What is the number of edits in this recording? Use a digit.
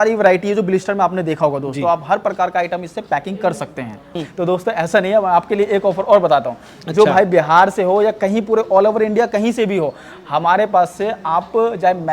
1